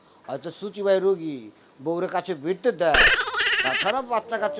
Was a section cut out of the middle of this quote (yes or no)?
no